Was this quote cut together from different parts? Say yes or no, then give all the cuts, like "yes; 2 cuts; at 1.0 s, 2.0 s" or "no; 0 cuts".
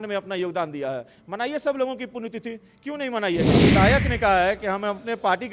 yes; 1 cut; at 3.6 s